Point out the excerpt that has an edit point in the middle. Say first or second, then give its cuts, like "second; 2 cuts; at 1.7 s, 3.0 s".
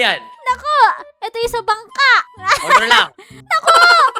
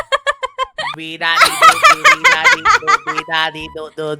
second; 1 cut; at 1.0 s